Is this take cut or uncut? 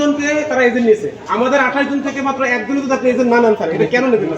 uncut